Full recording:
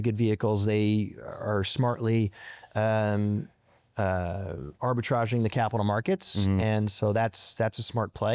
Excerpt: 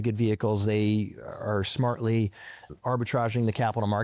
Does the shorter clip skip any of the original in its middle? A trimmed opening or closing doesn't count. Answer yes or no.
yes